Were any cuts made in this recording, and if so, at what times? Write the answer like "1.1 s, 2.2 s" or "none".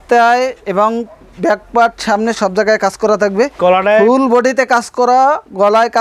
3.5 s